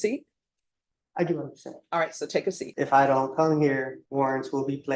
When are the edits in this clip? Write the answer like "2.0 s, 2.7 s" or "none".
2.7 s, 4.0 s